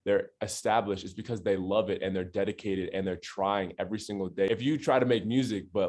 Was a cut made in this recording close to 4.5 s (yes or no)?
yes